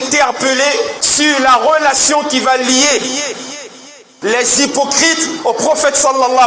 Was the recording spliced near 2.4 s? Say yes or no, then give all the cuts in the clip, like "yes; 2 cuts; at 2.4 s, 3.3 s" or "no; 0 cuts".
no; 1 cut; at 0.9 s